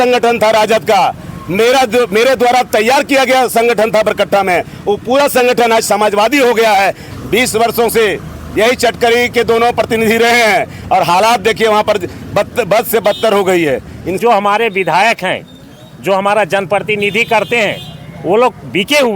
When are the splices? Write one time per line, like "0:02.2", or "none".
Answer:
0:07.1
0:14.2